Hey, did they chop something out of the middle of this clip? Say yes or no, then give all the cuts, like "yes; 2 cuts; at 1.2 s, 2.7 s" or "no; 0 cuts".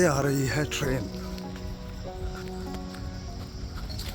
no; 0 cuts